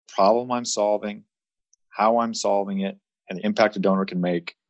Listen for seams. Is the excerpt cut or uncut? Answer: uncut